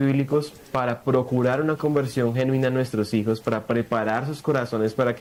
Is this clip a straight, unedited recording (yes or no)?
yes